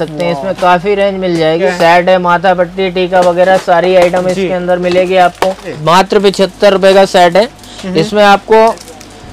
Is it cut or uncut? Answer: cut